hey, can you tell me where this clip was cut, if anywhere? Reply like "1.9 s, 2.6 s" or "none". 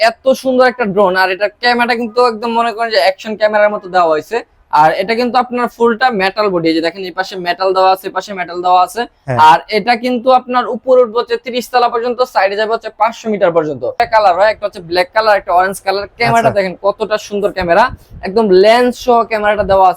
13.9 s